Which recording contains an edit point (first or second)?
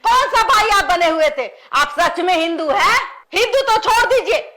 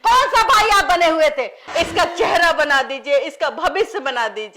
second